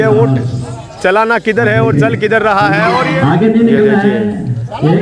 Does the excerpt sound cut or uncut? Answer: cut